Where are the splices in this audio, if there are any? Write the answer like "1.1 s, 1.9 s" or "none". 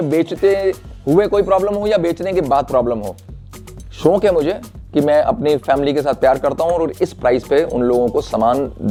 none

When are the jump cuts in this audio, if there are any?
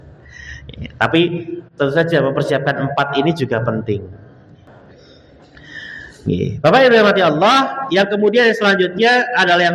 4.7 s

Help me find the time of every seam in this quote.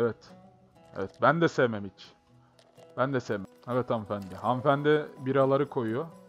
3.5 s

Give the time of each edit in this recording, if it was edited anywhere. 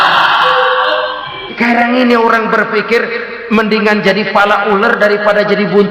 1.6 s

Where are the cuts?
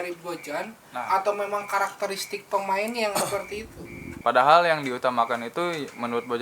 4.2 s

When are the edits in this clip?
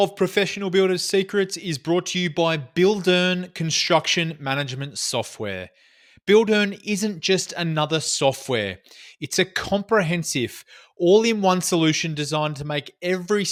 none

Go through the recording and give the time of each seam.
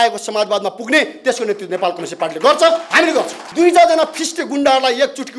3.4 s

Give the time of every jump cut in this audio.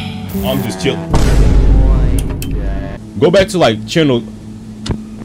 3.0 s

